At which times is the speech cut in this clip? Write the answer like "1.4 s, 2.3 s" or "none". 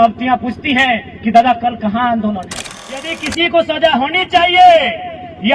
3.2 s